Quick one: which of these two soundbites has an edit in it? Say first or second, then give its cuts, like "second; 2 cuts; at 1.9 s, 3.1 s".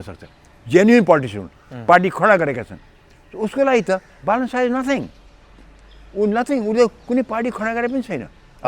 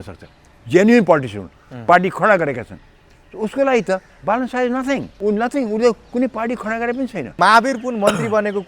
second; 2 cuts; at 5.1 s, 7.3 s